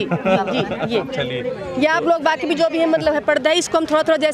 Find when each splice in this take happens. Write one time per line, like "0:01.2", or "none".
none